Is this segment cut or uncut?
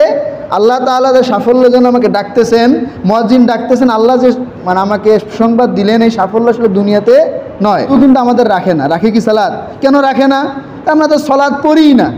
cut